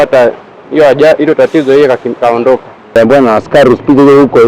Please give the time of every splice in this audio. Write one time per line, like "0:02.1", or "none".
0:02.8